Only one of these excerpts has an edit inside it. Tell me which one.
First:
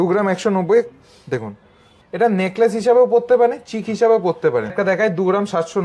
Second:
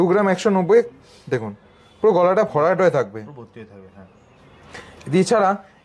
first; 2 cuts; at 1.8 s, 4.7 s

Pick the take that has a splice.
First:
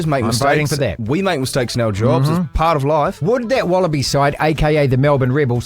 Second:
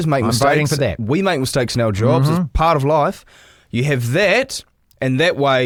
first; 1 cut; at 3.2 s

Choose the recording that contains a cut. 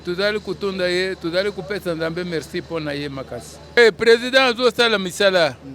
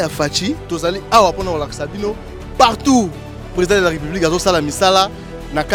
first; 1 cut; at 3.8 s

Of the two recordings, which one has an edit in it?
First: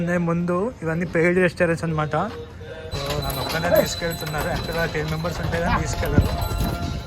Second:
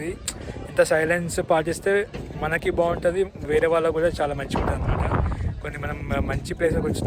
first; 1 cut; at 2.9 s

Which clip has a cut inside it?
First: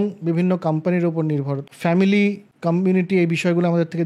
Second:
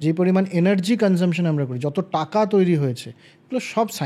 first; 2 cuts; at 1.7 s, 2.5 s

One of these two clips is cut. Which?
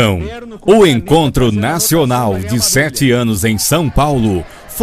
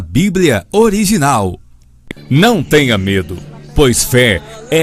first; 1 cut; at 1.8 s

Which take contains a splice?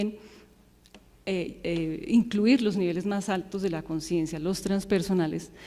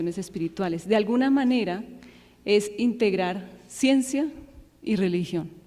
second; 1 cut; at 1.8 s

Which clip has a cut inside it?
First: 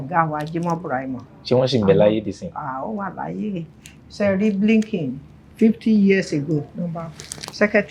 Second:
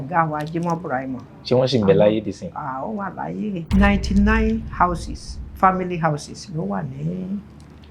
second; 1 cut; at 3.6 s

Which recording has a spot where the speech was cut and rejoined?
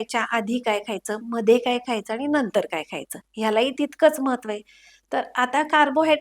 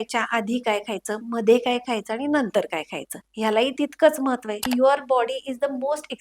second; 1 cut; at 4.6 s

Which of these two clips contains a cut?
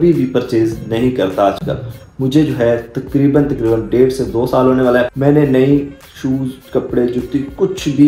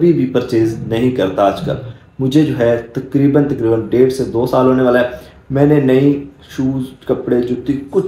first; 1 cut; at 5.1 s

